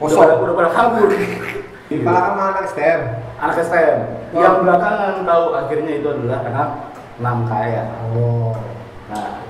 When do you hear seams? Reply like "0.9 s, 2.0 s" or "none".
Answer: 1.9 s